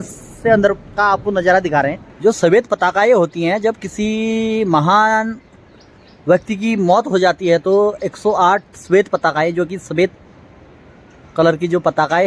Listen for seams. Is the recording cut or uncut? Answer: cut